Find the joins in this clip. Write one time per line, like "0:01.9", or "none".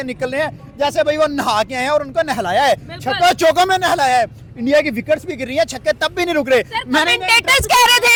none